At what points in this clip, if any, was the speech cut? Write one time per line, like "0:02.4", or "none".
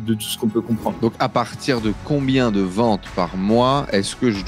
0:01.0

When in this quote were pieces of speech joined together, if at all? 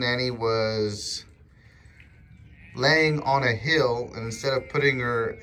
none

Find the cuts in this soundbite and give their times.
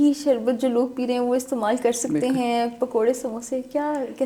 none

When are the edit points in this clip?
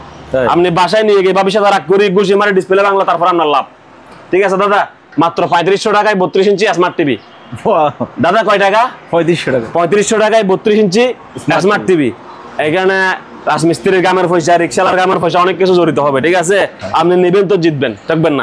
none

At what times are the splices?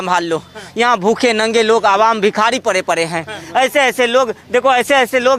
none

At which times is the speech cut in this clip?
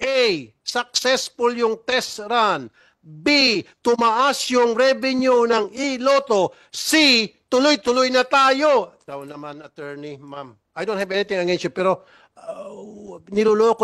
none

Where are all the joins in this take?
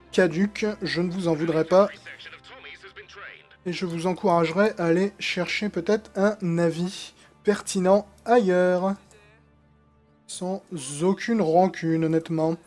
0:01.4

